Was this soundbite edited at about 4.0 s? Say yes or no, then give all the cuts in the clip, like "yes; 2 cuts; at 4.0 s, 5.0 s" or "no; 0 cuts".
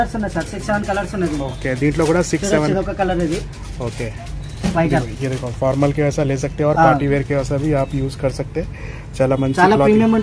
no; 0 cuts